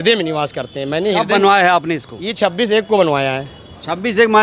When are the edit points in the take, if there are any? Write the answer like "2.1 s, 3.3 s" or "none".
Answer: none